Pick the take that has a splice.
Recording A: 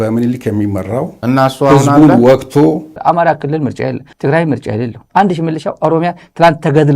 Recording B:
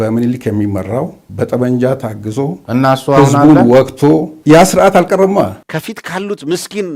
A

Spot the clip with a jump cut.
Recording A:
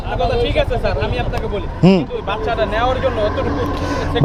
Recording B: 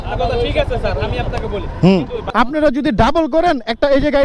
B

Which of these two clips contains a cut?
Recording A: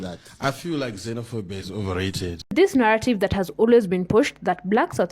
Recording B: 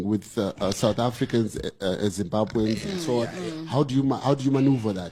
A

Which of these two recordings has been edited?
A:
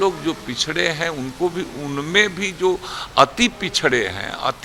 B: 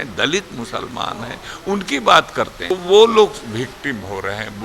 B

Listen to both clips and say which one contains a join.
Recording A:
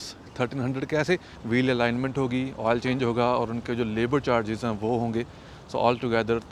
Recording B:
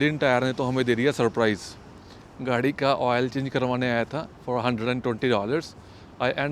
A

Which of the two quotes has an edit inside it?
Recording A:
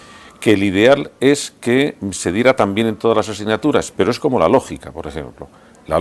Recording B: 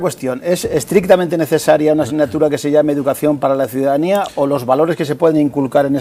A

